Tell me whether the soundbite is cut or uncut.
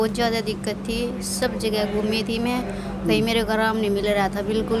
uncut